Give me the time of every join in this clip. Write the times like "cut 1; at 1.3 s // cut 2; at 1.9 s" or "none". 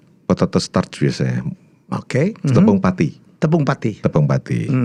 none